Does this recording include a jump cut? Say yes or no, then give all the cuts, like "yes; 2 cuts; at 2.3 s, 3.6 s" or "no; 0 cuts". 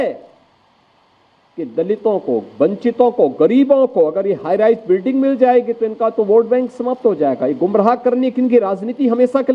no; 0 cuts